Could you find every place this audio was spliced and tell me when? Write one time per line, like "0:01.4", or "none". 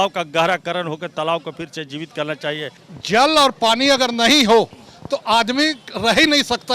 0:02.8